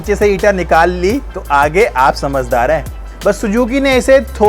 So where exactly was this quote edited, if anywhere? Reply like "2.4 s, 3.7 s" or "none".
3.1 s